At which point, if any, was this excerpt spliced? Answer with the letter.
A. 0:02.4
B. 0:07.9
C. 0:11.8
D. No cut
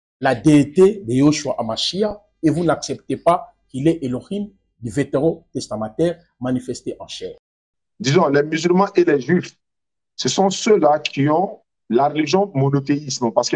B